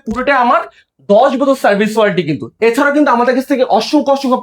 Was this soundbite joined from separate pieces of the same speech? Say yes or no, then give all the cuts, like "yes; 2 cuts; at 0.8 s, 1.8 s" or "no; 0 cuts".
no; 0 cuts